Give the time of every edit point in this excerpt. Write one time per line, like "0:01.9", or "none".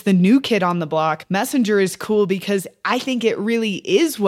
0:01.2